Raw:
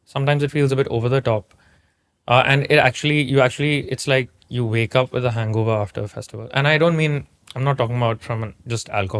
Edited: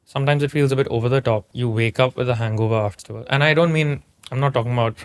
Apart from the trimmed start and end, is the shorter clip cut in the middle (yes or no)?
yes